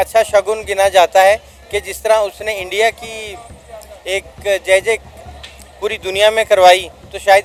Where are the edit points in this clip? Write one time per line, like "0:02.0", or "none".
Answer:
none